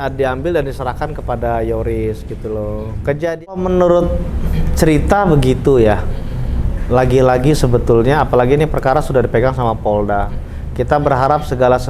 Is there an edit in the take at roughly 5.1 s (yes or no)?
no